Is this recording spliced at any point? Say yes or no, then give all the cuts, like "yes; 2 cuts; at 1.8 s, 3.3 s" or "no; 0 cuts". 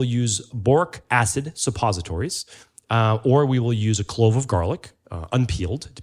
yes; 1 cut; at 1.0 s